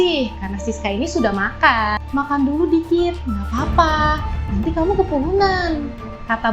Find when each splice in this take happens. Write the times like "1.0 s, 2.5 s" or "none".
2.0 s